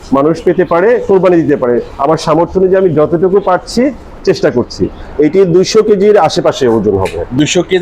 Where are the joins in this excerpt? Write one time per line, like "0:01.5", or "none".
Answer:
0:04.9